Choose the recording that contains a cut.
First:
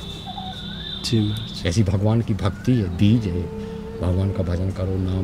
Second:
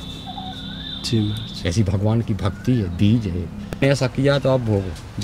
second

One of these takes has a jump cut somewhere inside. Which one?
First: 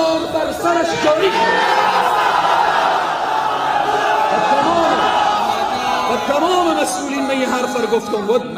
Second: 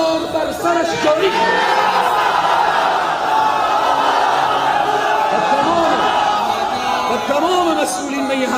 first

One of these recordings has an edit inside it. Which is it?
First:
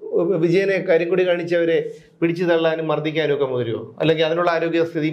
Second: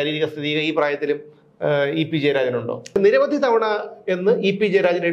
second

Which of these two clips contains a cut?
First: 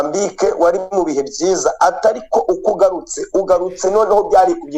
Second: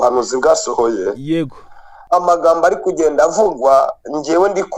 second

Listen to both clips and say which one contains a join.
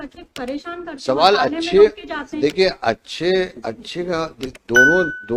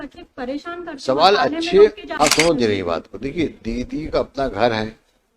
second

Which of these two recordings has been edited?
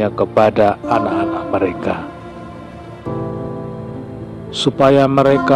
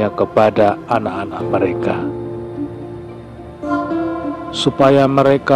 first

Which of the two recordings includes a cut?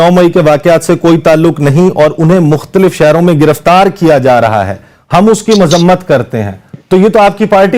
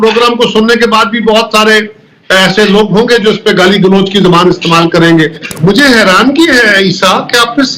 second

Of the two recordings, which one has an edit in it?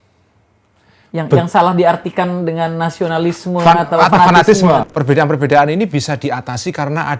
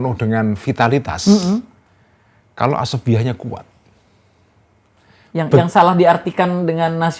first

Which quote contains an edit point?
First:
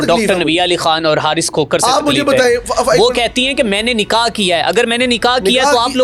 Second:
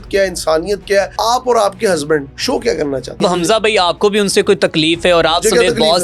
second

